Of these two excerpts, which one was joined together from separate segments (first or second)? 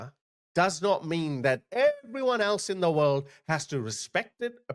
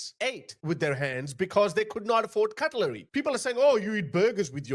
second